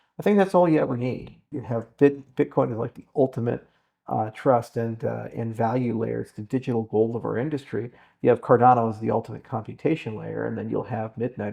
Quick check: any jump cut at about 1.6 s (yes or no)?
yes